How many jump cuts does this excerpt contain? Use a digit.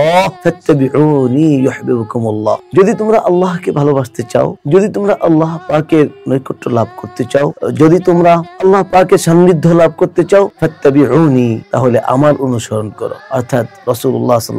0